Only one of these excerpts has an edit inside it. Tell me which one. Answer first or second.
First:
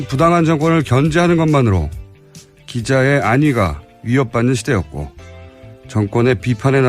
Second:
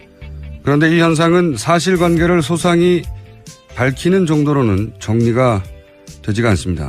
first